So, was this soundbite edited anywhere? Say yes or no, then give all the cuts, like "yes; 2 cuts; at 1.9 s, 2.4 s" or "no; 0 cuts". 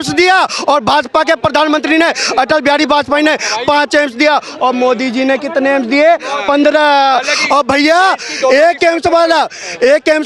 no; 0 cuts